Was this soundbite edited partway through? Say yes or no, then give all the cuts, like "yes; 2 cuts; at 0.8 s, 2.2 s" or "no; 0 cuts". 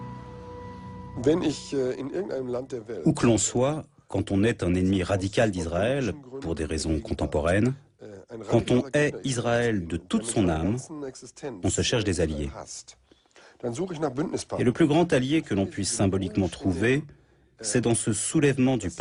no; 0 cuts